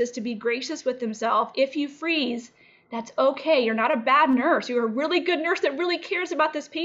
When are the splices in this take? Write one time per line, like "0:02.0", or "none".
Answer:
none